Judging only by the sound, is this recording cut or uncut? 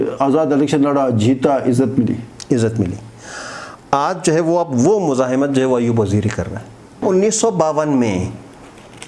cut